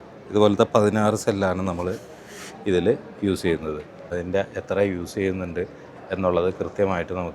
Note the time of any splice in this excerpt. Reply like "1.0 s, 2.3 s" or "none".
4.0 s